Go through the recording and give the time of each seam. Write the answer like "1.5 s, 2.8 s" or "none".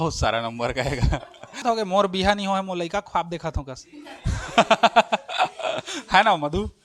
1.6 s